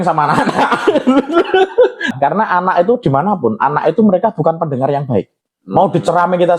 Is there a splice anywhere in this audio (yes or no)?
yes